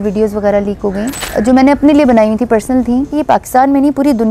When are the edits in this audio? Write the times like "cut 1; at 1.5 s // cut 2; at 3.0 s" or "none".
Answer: cut 1; at 1.2 s // cut 2; at 3.1 s

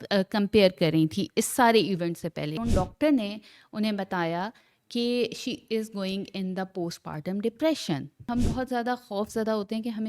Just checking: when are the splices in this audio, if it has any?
cut 1; at 2.6 s // cut 2; at 8.3 s

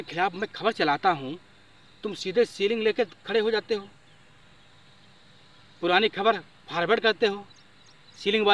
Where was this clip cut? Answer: none

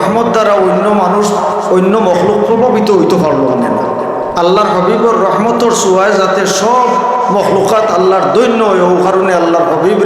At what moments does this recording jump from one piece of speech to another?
none

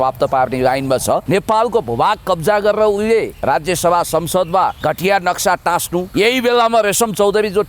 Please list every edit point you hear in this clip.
cut 1; at 1.2 s // cut 2; at 3.3 s // cut 3; at 4.8 s // cut 4; at 6.1 s

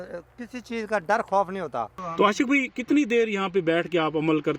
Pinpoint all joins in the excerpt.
cut 1; at 2.2 s

